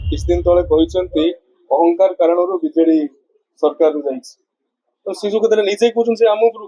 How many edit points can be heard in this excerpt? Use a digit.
0